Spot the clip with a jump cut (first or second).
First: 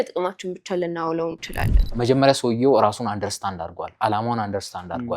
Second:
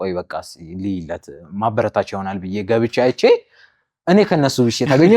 first